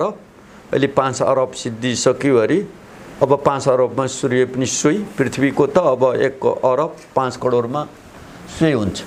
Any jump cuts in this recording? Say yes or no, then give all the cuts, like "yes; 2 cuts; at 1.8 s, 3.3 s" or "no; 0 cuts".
no; 0 cuts